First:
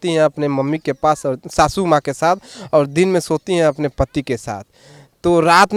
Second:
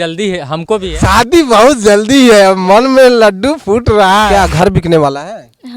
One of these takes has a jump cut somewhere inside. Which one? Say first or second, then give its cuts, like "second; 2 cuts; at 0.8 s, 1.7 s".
second; 2 cuts; at 0.9 s, 4.2 s